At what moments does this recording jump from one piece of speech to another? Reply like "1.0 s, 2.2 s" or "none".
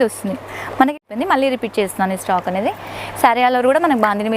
1.0 s